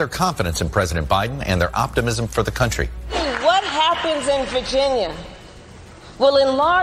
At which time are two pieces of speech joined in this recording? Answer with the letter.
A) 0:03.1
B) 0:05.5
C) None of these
A